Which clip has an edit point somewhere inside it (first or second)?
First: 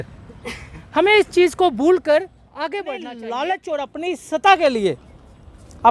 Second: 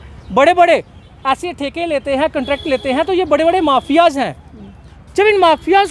first